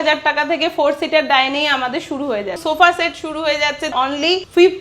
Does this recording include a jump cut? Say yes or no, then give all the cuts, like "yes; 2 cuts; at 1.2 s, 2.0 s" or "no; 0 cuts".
yes; 2 cuts; at 2.6 s, 4.0 s